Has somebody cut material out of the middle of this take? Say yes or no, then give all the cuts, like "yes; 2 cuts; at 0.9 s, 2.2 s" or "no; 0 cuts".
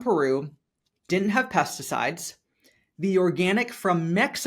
yes; 1 cut; at 1.0 s